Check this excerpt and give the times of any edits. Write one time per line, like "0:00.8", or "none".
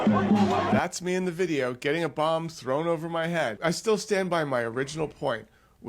0:03.6